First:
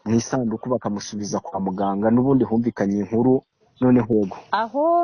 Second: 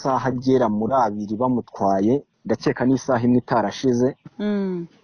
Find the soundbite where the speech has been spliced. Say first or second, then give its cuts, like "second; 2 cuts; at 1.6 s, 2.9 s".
first; 1 cut; at 4.1 s